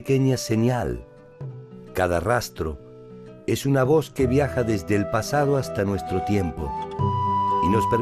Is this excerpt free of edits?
yes; 0 cuts

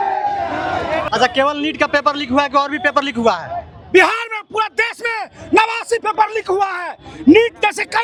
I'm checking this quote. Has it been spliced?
no; 0 cuts

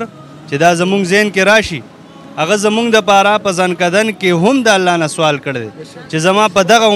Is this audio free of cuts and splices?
yes; 0 cuts

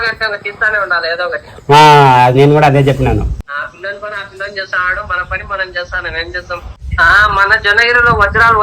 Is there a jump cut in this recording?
yes; 2 cuts; at 3.4 s, 6.8 s

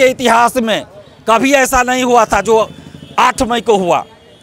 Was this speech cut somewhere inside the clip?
no; 0 cuts

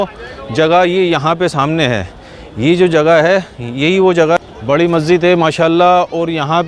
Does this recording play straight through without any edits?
no; 1 cut; at 4.4 s

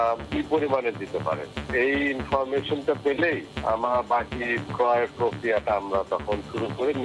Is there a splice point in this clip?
no; 0 cuts

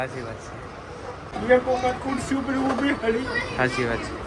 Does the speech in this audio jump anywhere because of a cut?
yes; 1 cut; at 1.2 s

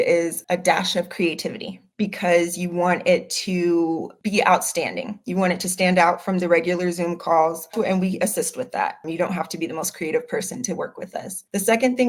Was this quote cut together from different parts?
yes; 1 cut; at 7.7 s

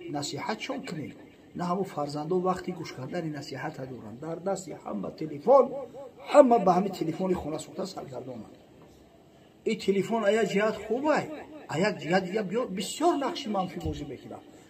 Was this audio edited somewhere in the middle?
no; 0 cuts

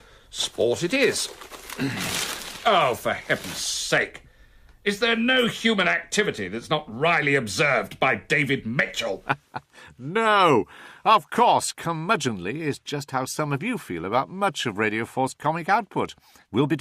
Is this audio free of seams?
no; 1 cut; at 7.4 s

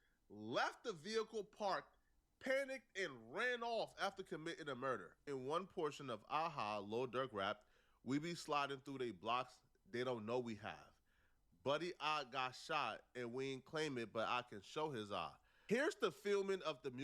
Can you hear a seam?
yes; 2 cuts; at 5.2 s, 15.5 s

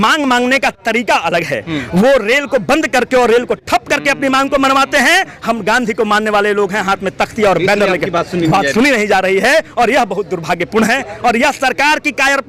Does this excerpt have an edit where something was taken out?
no; 0 cuts

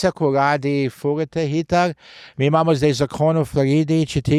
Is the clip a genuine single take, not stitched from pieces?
yes; 0 cuts

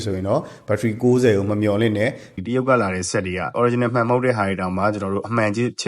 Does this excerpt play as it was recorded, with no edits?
no; 2 cuts; at 2.3 s, 3.5 s

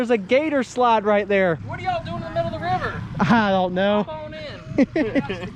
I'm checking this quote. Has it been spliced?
yes; 1 cut; at 1.6 s

